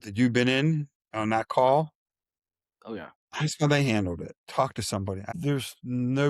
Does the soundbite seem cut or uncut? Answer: cut